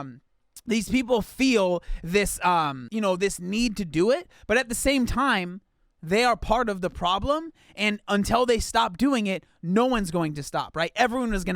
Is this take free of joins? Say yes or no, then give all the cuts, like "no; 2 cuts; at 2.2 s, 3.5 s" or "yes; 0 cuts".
no; 1 cut; at 2.8 s